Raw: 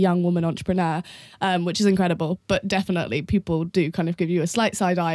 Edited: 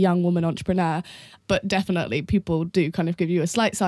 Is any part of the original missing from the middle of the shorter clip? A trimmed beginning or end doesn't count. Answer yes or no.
yes